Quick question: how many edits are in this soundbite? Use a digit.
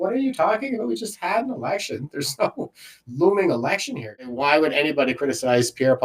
1